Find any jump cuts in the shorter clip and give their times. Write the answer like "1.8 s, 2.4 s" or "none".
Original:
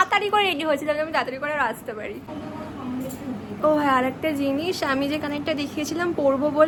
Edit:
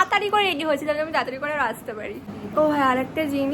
2.3 s

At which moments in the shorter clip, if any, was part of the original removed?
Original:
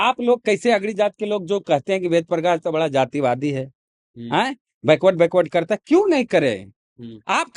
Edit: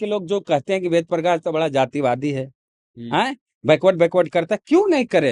none

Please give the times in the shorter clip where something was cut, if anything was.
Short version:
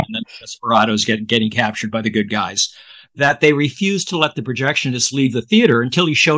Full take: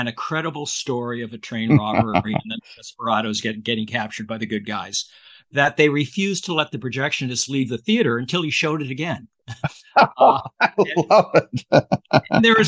none

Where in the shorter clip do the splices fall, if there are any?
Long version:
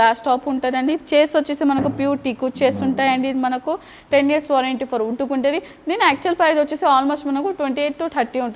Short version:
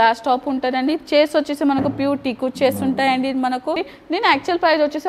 3.9 s

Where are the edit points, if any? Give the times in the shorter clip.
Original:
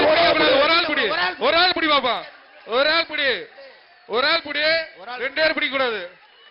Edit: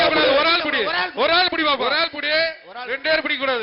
1.8 s

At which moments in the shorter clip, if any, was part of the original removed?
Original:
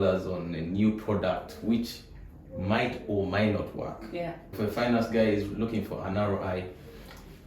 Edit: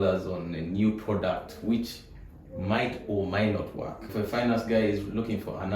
4.0 s

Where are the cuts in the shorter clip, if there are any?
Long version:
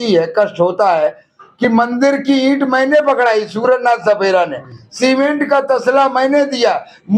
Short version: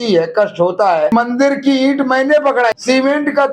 1.1 s, 2.8 s

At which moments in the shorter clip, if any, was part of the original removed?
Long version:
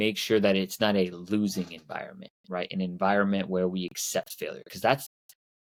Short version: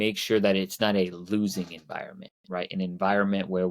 none

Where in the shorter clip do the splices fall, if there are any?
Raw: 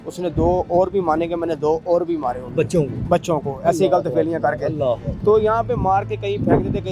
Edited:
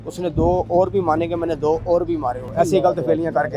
2.4 s

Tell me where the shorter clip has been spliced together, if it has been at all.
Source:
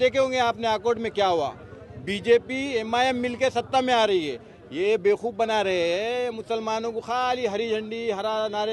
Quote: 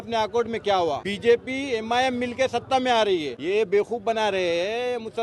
1.1 s, 3.3 s

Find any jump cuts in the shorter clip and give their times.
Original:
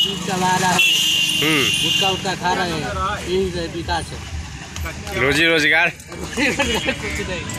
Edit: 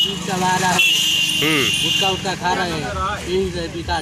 none

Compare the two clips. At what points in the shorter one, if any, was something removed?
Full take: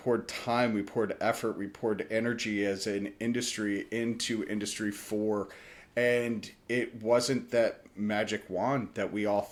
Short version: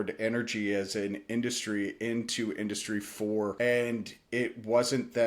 3.5 s

